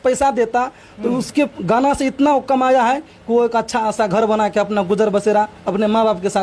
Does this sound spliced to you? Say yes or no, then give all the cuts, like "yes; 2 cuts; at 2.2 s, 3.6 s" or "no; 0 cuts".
no; 0 cuts